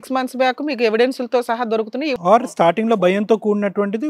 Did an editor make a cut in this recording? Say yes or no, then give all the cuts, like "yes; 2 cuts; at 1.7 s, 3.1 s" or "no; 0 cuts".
yes; 1 cut; at 2.1 s